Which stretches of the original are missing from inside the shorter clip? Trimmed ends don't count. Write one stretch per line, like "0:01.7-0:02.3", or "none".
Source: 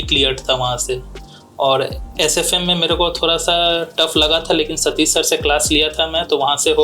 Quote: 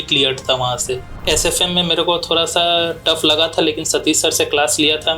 0:01.1-0:02.0